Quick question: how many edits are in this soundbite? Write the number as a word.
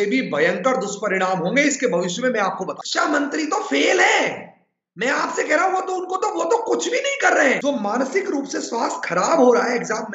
two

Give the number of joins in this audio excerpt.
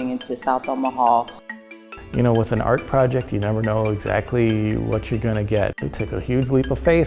two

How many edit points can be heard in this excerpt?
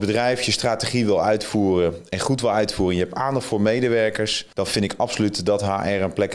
one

